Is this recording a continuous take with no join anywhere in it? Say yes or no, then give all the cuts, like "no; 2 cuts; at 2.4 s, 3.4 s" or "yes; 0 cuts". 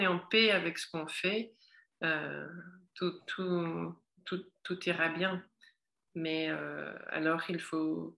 yes; 0 cuts